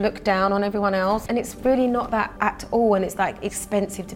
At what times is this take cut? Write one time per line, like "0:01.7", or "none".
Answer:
0:01.2
0:02.3

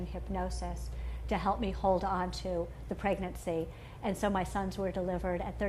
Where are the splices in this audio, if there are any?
0:03.0

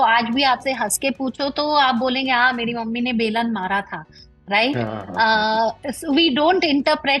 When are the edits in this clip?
none

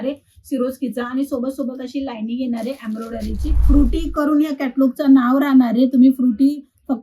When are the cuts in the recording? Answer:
0:03.5

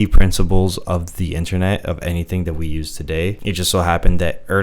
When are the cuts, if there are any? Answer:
0:03.4

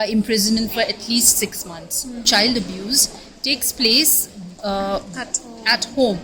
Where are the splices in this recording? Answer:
0:02.2

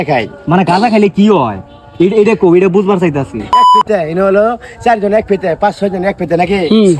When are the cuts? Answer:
0:03.8

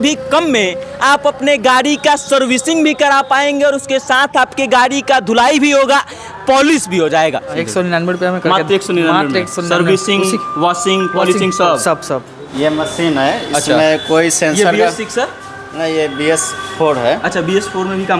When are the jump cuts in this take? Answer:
0:07.5
0:12.4

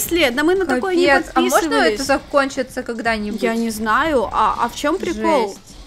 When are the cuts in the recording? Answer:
none

